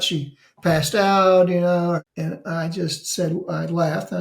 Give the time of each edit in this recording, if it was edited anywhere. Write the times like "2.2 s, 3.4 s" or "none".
2.1 s